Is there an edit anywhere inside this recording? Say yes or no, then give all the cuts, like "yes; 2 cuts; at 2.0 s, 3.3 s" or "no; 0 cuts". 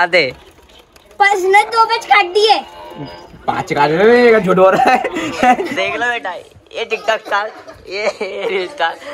yes; 1 cut; at 5.7 s